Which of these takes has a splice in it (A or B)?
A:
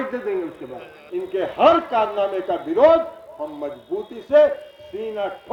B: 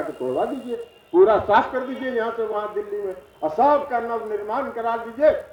A